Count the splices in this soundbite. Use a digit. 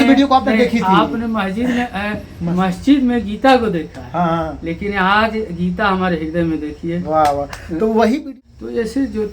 1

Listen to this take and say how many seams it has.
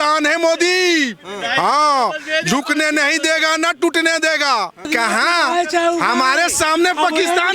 1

